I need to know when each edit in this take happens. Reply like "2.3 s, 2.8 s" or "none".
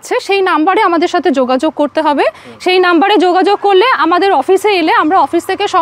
none